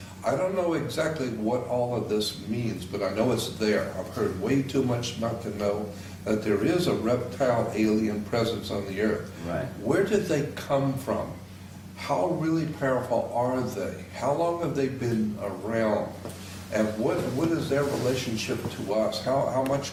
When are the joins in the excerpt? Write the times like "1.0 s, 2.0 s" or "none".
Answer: none